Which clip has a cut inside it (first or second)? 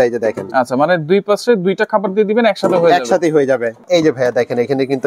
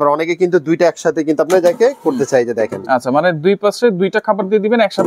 first